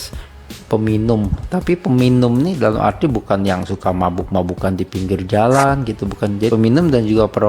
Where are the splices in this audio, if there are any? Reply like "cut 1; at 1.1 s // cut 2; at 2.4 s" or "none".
cut 1; at 6.5 s